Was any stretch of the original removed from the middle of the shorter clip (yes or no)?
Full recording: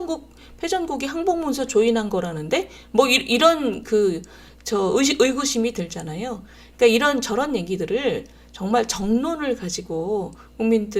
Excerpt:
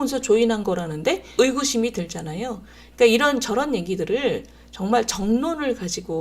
yes